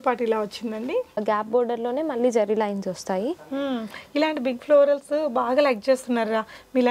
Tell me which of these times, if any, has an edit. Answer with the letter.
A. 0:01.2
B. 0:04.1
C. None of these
A